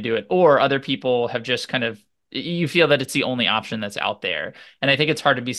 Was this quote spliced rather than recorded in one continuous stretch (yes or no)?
no